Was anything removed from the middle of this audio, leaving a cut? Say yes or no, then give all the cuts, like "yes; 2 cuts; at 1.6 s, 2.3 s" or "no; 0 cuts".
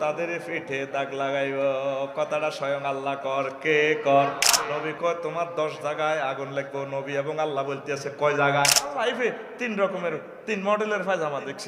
yes; 2 cuts; at 4.7 s, 9.0 s